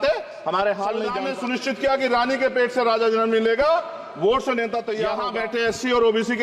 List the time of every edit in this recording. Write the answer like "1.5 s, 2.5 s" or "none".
1.3 s, 5.2 s